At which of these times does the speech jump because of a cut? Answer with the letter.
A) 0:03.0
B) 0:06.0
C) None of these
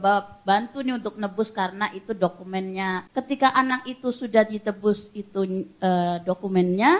A